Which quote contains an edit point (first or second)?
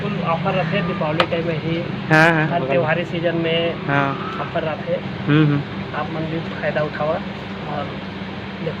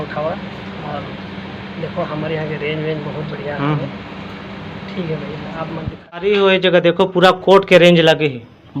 second